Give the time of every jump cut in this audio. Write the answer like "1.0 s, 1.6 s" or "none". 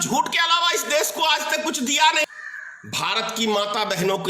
2.3 s